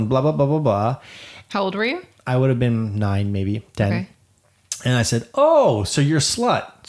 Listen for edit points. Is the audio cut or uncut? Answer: uncut